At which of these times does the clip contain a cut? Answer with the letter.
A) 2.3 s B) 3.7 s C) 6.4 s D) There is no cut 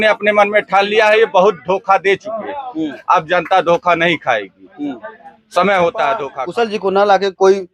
C